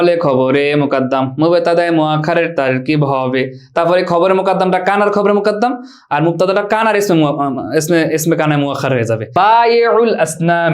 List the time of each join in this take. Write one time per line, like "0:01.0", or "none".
0:09.2